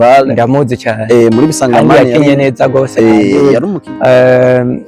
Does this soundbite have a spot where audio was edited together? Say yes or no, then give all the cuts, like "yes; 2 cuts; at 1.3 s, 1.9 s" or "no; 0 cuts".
yes; 1 cut; at 3.3 s